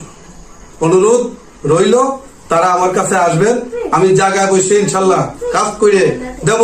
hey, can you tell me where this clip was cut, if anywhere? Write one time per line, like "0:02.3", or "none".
none